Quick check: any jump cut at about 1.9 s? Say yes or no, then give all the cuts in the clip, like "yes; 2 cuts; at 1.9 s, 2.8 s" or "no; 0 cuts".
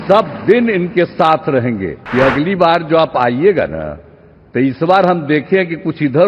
yes; 1 cut; at 1.9 s